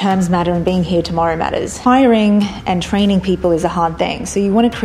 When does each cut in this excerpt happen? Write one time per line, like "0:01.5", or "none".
0:01.8